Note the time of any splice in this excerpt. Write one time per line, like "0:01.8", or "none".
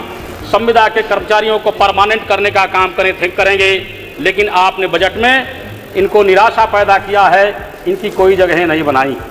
none